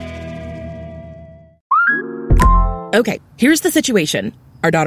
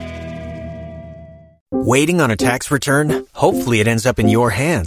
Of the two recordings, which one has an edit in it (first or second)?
second